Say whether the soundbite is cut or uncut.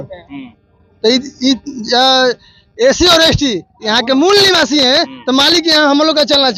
uncut